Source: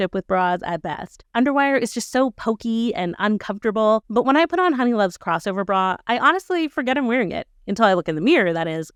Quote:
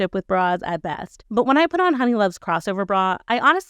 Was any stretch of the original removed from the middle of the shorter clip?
yes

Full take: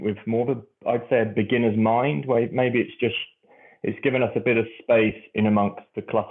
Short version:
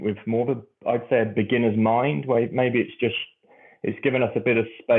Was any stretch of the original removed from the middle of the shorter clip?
no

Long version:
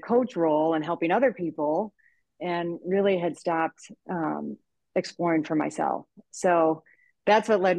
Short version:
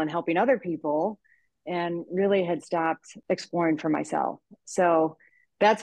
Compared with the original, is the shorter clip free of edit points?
no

